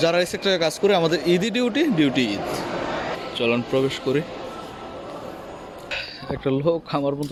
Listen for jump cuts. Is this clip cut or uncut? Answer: uncut